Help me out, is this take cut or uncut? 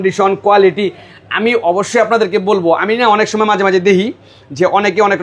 uncut